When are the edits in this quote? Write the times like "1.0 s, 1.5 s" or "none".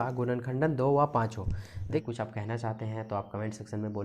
1.9 s

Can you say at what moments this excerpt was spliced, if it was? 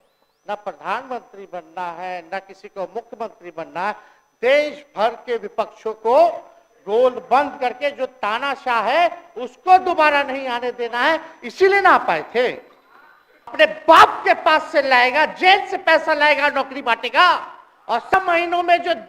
13.5 s, 18.2 s

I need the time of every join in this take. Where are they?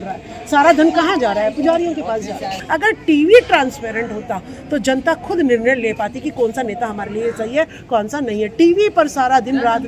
2.5 s

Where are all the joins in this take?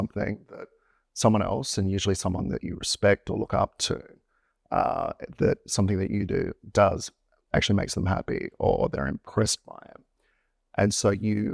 none

